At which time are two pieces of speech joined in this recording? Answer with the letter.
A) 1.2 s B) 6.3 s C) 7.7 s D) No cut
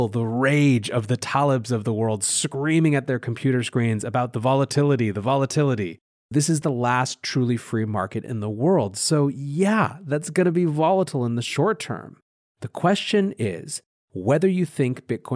B